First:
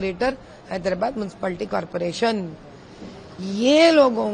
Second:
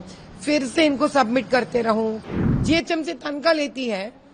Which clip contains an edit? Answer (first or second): second